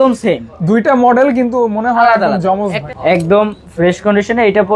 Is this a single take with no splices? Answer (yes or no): no